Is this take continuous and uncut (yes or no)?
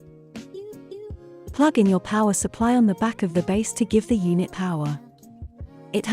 no